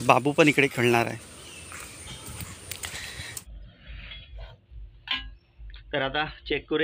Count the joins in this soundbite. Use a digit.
1